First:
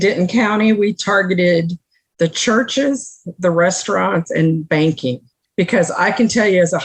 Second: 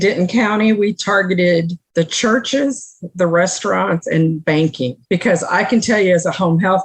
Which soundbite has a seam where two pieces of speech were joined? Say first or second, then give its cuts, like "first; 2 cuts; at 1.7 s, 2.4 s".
second; 2 cuts; at 1.8 s, 5.0 s